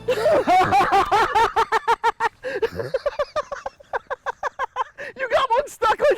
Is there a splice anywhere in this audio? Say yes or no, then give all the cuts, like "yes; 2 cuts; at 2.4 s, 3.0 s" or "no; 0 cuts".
yes; 1 cut; at 5.0 s